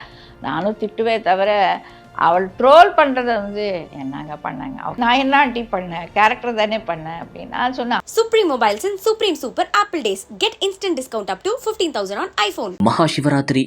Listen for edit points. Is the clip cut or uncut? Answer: cut